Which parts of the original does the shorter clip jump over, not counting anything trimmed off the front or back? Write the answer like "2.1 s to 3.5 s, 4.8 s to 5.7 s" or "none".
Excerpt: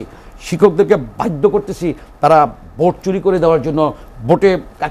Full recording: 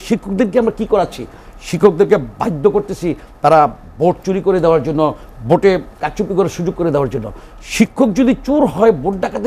none